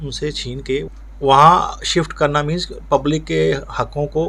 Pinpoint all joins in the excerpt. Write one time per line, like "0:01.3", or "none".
0:00.9